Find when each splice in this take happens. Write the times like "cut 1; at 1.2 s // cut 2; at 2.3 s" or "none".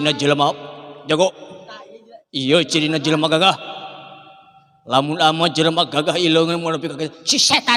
none